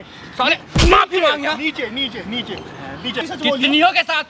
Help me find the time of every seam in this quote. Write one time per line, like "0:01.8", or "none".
0:03.2